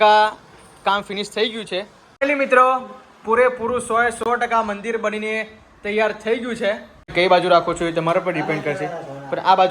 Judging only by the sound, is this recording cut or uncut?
cut